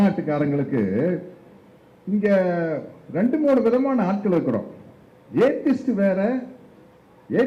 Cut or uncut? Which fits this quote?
uncut